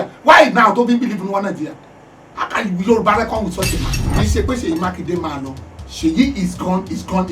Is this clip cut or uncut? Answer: cut